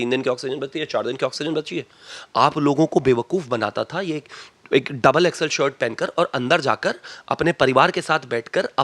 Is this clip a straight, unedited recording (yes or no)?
yes